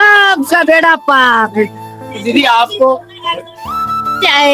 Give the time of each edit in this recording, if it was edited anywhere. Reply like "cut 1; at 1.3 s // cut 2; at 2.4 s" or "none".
none